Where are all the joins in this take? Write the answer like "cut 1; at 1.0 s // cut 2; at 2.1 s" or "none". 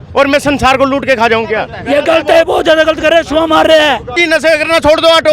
cut 1; at 1.8 s // cut 2; at 4.2 s